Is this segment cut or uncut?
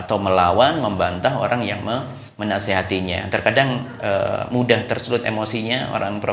uncut